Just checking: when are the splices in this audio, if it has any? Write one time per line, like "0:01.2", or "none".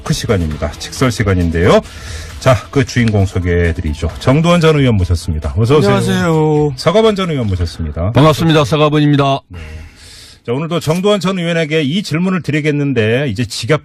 none